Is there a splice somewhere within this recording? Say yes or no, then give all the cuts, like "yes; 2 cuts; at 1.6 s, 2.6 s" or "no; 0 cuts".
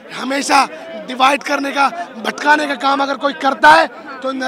no; 0 cuts